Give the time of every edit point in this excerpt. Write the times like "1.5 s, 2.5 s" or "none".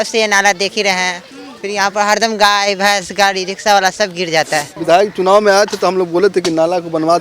4.7 s

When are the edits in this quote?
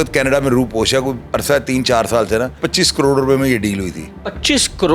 2.6 s

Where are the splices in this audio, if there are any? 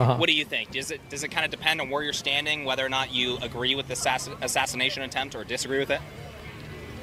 none

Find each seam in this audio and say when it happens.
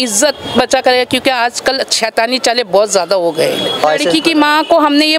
3.8 s

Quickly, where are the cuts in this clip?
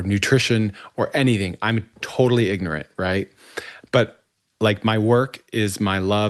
none

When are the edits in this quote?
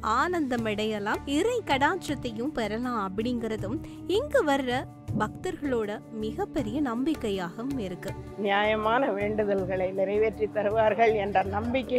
1.2 s, 8.3 s

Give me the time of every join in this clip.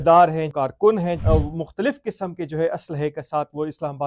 0.9 s

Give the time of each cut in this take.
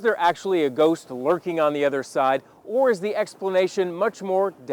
none

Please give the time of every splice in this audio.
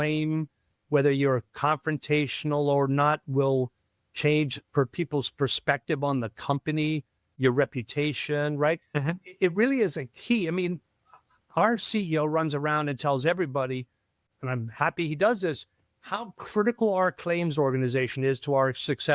14.2 s

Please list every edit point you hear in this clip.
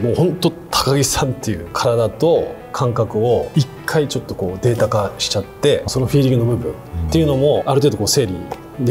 1.7 s, 3.5 s, 5.9 s, 7.6 s

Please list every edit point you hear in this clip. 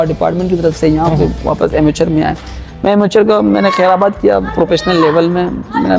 none

